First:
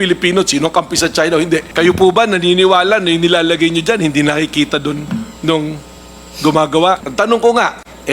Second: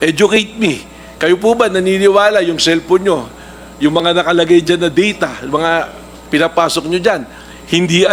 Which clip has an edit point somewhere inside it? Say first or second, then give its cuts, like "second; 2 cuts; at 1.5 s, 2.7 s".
first; 2 cuts; at 1.7 s, 7.1 s